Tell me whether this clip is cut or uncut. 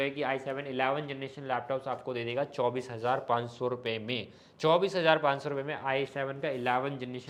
uncut